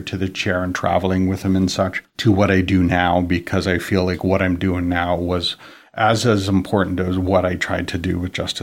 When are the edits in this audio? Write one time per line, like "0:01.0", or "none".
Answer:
0:02.0